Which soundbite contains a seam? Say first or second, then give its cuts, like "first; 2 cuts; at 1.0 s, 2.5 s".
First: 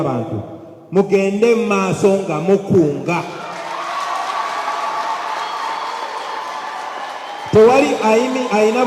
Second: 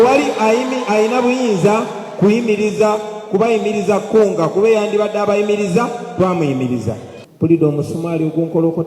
second; 1 cut; at 7.1 s